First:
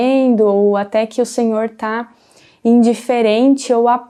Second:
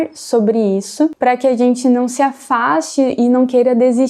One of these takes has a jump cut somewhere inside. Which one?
second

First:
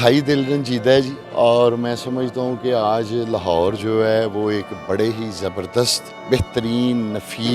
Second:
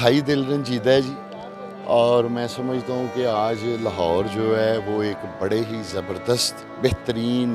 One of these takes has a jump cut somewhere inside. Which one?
first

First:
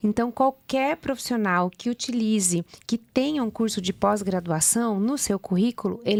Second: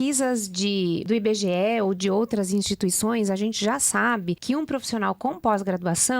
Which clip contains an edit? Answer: second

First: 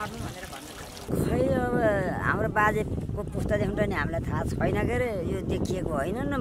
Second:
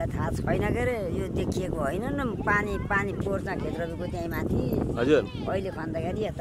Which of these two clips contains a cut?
first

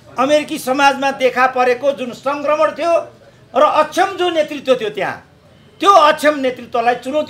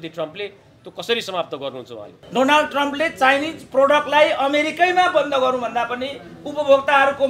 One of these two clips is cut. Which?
second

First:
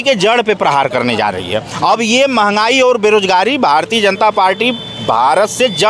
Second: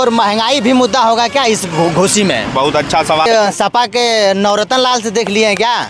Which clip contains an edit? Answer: second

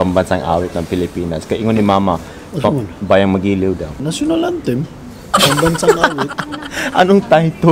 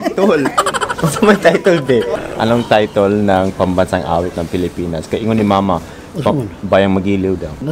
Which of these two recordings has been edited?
second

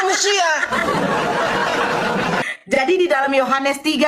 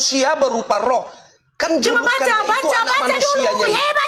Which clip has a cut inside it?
first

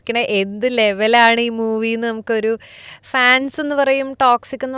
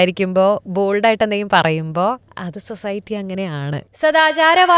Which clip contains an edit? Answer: second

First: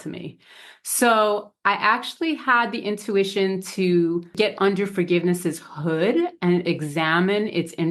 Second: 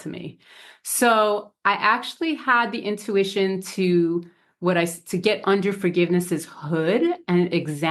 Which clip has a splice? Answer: first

